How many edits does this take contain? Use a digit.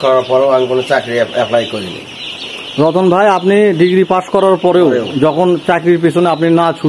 0